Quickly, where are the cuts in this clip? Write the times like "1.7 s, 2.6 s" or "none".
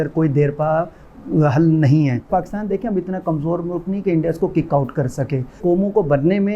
2.2 s, 5.6 s